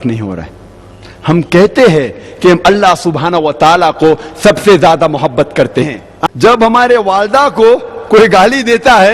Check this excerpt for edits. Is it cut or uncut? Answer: cut